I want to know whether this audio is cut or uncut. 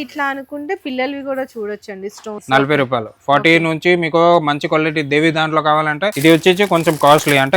cut